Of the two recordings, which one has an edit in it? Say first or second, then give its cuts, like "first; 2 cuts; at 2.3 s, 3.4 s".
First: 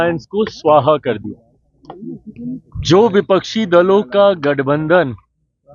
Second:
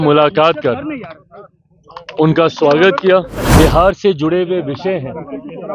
second; 1 cut; at 3.4 s